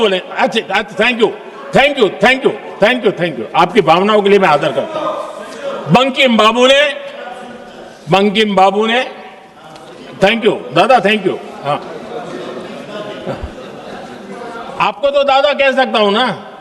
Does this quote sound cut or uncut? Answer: uncut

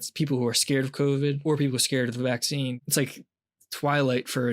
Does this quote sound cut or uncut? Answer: cut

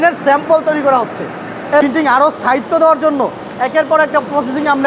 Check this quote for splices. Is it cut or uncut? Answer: cut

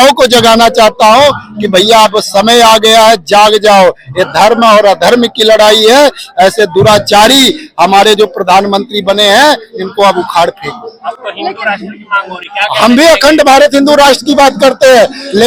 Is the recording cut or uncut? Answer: uncut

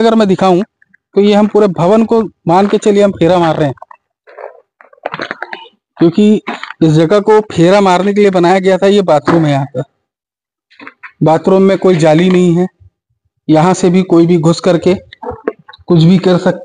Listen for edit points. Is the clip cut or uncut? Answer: uncut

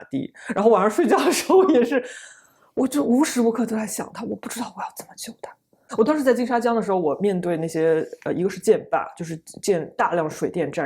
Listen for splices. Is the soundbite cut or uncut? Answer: cut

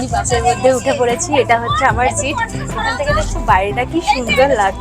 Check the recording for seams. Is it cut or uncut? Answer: uncut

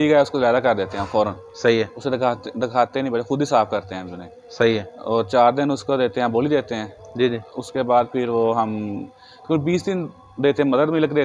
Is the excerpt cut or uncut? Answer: uncut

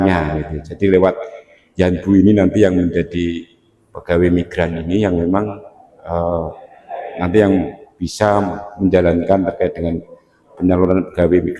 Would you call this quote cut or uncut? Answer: uncut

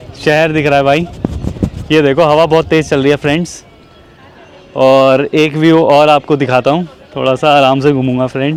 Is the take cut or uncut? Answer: uncut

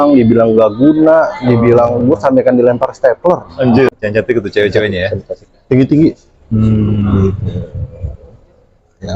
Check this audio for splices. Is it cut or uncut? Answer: cut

